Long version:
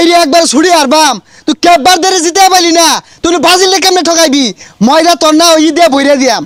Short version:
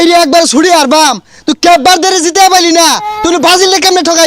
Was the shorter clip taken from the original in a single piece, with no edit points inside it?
yes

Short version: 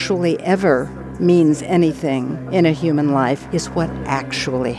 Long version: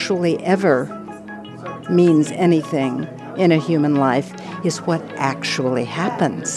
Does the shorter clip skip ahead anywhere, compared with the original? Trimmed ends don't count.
yes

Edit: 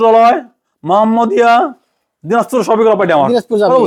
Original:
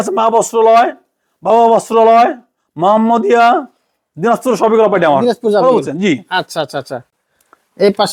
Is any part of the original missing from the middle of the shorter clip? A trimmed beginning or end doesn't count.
no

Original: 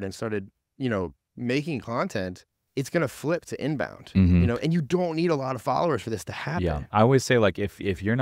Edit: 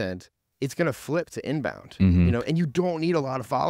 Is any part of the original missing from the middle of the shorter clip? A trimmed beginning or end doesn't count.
no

